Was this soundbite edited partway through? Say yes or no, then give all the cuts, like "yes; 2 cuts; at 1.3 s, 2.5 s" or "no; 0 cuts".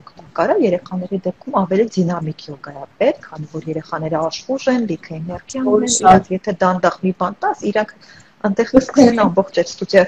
no; 0 cuts